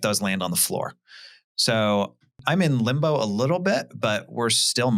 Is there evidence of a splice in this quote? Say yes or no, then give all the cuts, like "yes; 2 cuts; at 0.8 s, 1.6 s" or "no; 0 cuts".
yes; 1 cut; at 2.4 s